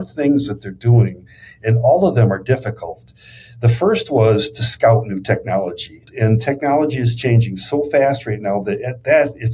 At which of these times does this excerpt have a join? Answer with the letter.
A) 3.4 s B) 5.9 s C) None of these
B